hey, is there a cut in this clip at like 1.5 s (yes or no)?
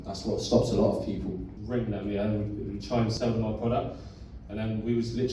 yes